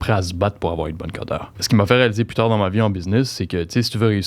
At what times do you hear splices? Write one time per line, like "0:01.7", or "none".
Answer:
0:01.5